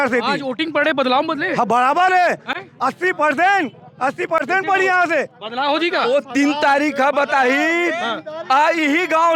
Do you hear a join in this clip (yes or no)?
no